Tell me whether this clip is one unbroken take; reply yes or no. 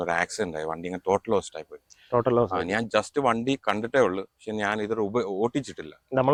yes